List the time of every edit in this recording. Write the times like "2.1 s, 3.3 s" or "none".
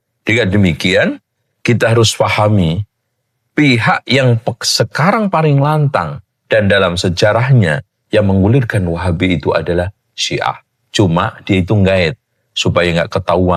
none